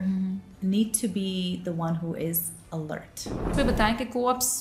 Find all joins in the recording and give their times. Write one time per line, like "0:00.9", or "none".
0:03.5